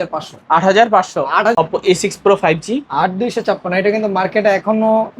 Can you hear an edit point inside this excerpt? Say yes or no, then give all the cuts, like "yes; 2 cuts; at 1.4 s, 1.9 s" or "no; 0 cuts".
yes; 1 cut; at 1.5 s